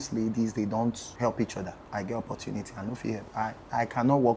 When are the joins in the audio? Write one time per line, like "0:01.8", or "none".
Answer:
0:01.1
0:01.8